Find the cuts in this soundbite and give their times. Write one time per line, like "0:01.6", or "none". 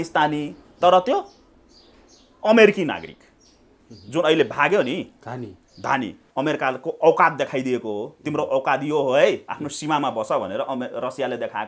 0:06.2